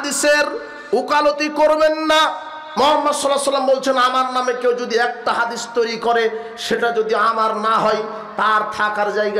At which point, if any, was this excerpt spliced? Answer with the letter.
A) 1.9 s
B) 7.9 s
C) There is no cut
C